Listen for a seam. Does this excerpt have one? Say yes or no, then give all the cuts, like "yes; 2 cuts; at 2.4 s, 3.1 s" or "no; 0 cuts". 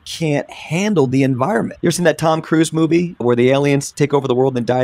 yes; 2 cuts; at 1.7 s, 3.2 s